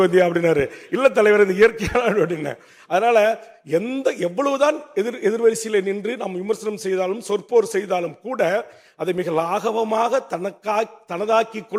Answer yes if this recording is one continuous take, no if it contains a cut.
yes